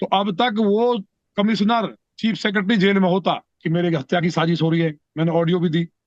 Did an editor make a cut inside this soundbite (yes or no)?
yes